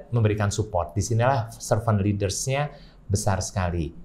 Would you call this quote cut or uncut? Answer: uncut